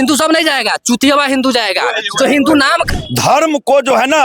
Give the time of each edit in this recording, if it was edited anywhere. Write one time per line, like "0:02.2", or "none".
0:02.9